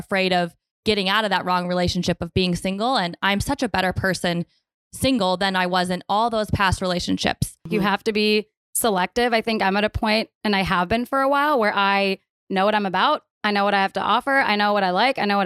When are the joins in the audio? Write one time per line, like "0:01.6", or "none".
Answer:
0:07.7